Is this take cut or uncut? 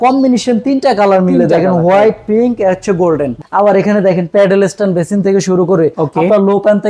cut